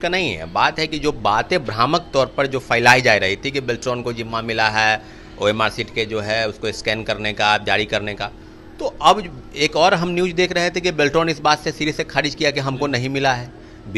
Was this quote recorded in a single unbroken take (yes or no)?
yes